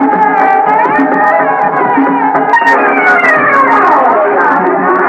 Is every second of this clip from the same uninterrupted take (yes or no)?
yes